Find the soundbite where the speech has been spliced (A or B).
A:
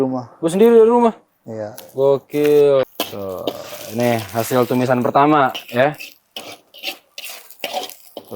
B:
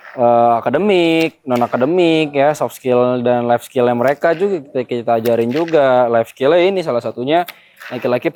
A